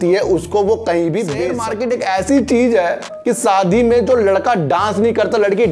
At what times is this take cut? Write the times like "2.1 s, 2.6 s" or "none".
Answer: 1.6 s